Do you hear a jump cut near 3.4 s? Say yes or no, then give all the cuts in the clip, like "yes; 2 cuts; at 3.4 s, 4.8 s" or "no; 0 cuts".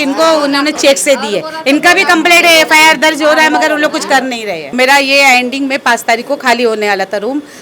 no; 1 cut; at 4.8 s